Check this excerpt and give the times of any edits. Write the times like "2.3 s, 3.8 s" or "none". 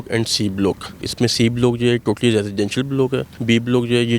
1.1 s, 3.3 s